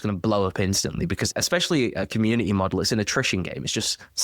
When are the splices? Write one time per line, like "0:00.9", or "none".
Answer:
none